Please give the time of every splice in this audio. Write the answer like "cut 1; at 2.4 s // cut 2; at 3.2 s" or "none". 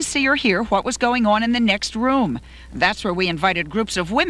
none